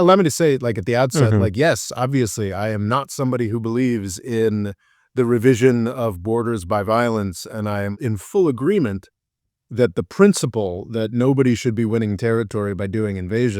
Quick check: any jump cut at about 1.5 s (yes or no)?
no